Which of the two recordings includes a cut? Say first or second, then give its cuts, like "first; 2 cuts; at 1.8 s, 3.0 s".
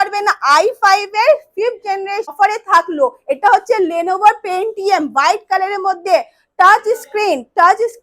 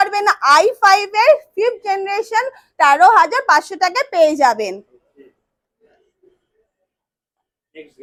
first; 1 cut; at 2.3 s